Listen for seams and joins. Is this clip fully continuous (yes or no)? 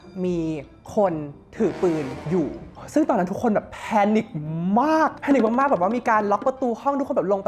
yes